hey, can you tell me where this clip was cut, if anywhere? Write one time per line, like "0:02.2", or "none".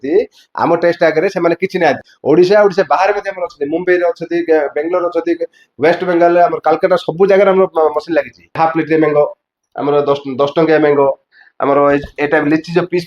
0:02.1
0:08.6

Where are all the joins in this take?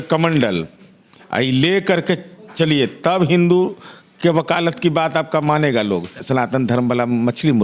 0:06.2

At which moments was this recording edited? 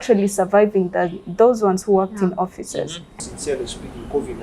0:03.1

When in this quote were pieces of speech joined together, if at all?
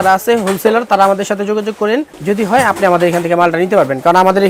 none

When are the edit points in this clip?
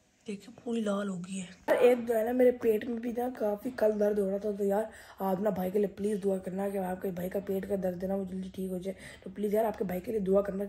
0:01.5

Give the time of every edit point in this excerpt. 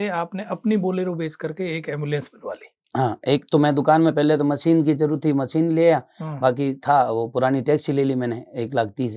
none

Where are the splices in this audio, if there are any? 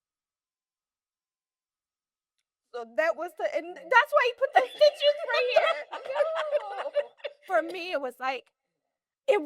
0:07.3

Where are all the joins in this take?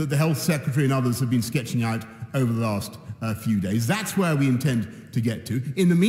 none

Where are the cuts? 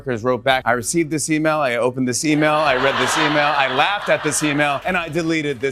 0:04.8

